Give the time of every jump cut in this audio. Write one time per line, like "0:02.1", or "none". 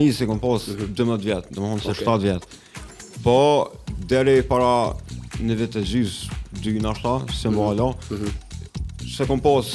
none